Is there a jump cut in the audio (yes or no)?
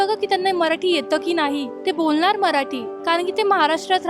yes